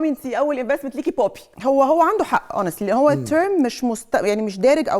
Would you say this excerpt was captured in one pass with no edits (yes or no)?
no